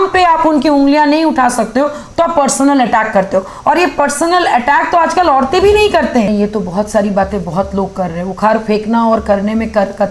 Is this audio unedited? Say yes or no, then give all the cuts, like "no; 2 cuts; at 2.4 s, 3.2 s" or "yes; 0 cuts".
no; 1 cut; at 6.3 s